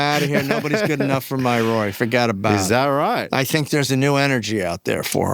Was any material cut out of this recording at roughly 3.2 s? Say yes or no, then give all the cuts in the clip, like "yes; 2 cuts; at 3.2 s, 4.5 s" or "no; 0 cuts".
yes; 1 cut; at 3.2 s